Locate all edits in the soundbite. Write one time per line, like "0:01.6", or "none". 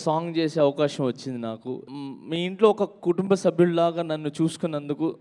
0:01.8